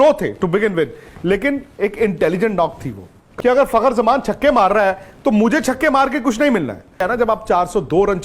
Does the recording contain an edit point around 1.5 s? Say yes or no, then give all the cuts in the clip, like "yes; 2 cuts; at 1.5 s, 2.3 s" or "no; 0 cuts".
no; 2 cuts; at 3.2 s, 7.0 s